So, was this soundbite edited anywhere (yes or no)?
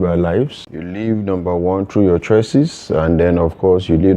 yes